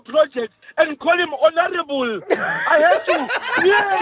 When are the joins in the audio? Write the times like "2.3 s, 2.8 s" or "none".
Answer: none